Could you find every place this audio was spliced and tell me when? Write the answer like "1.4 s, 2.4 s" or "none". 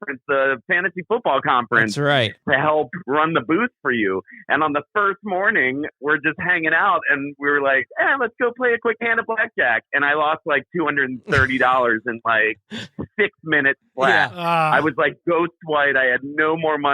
2.3 s, 5.9 s

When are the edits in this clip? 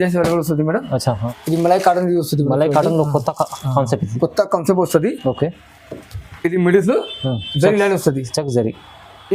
1.2 s

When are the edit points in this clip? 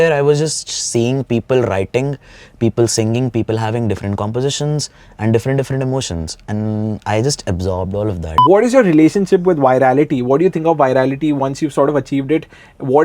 8.4 s

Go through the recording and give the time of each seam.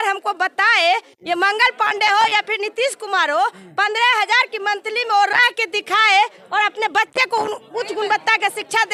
none

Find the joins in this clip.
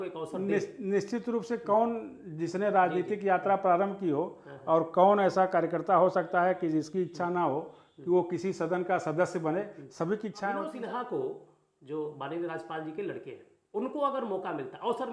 10.7 s

